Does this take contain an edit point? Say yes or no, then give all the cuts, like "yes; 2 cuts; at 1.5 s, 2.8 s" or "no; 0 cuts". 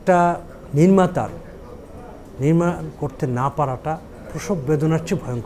no; 0 cuts